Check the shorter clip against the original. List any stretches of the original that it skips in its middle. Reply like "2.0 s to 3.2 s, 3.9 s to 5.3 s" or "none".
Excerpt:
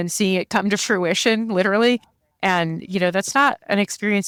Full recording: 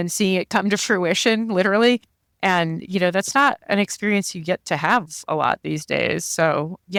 none